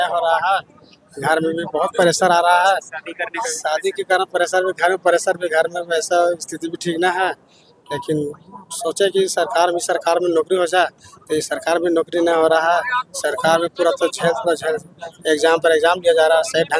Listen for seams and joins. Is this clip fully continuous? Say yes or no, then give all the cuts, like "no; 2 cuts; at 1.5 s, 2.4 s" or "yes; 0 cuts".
yes; 0 cuts